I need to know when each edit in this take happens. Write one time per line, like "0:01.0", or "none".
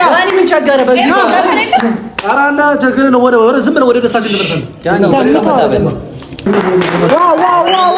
0:06.5